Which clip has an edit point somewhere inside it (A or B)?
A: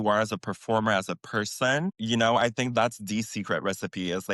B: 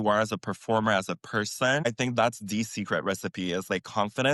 B